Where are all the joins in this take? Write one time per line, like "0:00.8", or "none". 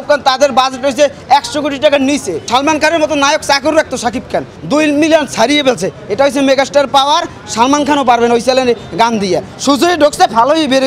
0:02.4
0:04.5
0:09.5

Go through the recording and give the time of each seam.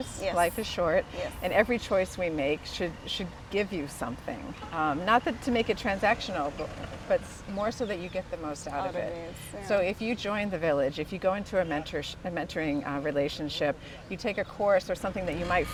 none

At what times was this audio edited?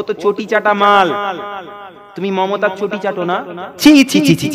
none

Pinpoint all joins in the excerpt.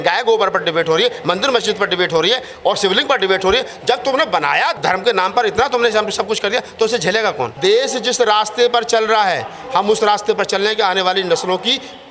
0:04.8
0:07.5

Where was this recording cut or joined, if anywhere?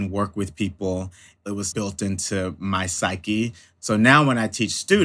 0:01.5
0:03.7

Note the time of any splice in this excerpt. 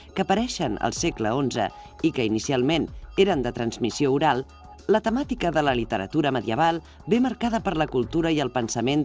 0:05.7

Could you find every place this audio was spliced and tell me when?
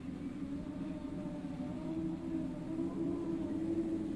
none

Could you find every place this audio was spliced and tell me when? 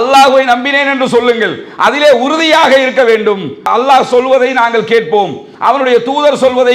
0:03.7

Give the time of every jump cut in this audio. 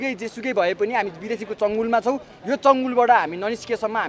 none

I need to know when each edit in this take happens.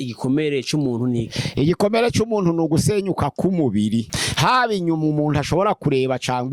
0:04.2

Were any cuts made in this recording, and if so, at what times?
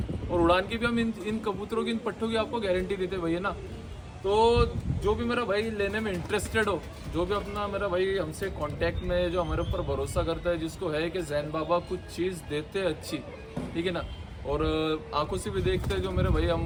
none

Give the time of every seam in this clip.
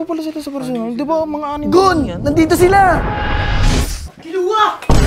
none

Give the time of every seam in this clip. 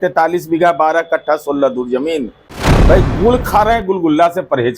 0:02.5

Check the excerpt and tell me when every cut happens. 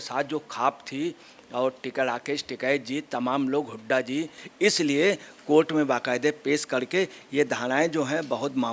0:04.4

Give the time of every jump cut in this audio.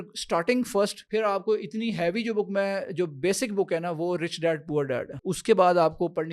0:01.0
0:05.2

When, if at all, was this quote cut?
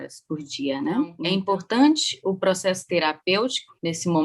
0:01.2

